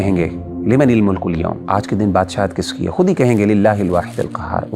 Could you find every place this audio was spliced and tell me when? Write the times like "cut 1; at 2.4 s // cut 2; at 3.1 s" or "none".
cut 1; at 1.6 s